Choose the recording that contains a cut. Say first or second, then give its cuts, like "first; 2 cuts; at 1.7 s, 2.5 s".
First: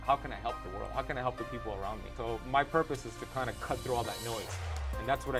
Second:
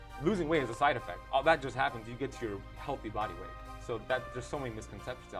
first; 1 cut; at 2.1 s